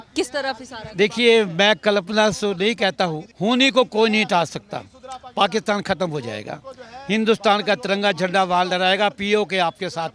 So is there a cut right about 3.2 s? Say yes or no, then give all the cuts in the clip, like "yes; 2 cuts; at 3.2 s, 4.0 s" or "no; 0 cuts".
yes; 1 cut; at 3.2 s